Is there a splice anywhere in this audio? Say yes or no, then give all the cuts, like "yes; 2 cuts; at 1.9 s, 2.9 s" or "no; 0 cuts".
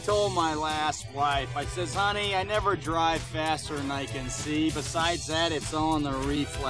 no; 0 cuts